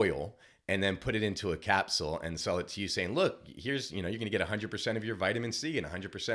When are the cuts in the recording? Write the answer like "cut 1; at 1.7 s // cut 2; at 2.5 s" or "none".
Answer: none